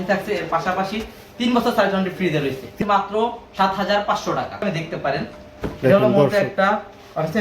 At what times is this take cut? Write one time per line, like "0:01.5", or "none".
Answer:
0:02.7
0:04.6